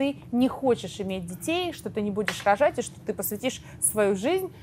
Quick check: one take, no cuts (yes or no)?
yes